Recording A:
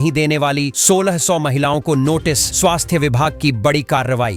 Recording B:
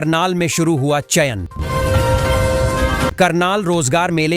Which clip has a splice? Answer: B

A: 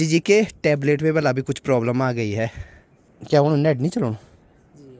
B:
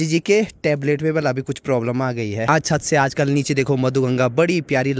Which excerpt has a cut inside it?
B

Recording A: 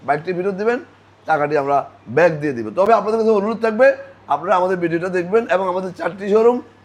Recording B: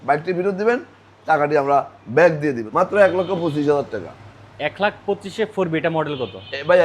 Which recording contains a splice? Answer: B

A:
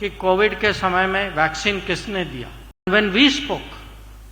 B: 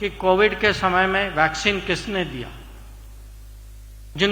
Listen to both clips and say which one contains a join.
A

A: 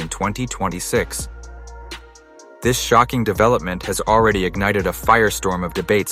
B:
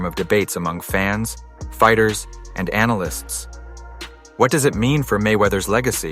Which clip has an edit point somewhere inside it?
B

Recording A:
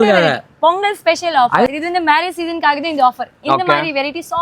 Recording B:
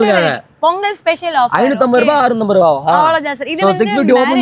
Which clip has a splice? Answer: A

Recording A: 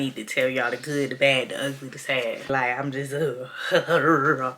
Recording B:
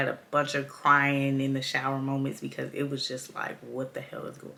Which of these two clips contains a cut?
A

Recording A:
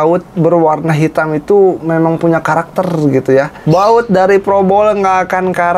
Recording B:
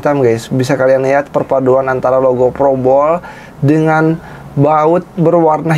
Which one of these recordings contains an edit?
A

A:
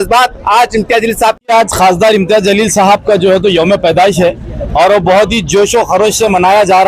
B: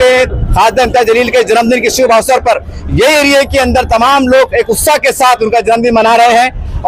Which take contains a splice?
A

